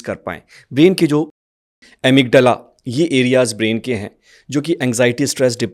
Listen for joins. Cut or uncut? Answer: uncut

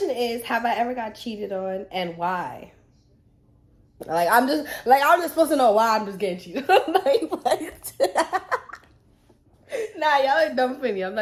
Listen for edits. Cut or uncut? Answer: uncut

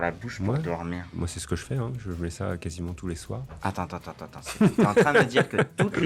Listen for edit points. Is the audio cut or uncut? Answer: cut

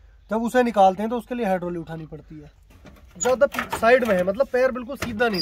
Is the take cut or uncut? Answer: cut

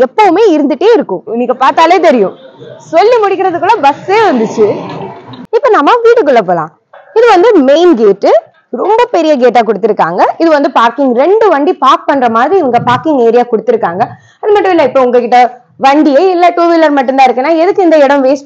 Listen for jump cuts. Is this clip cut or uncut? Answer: uncut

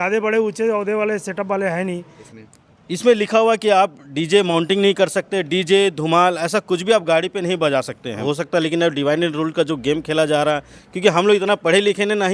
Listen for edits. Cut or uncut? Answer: cut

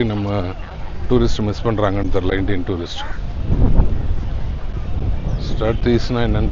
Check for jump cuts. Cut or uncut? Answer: uncut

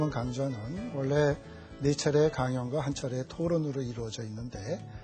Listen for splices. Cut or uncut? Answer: uncut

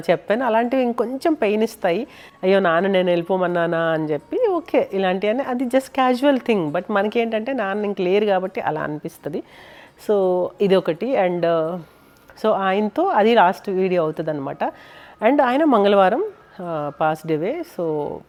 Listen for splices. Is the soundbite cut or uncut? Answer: uncut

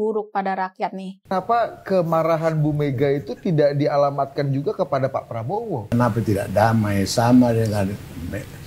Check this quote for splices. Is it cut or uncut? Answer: cut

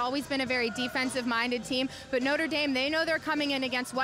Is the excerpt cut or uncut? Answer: uncut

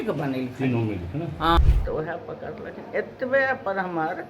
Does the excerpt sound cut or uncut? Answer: cut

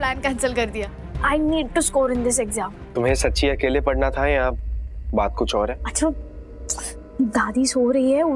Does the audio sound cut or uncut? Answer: cut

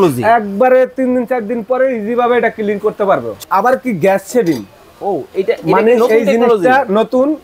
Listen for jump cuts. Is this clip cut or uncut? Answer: cut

